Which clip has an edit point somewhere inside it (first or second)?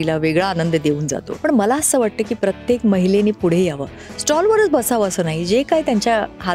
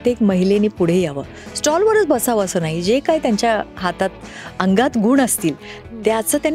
first